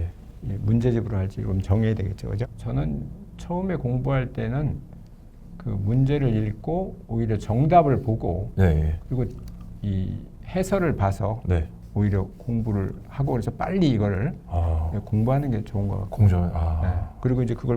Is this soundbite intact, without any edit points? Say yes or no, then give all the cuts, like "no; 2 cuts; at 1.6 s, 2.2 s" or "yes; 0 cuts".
no; 1 cut; at 2.4 s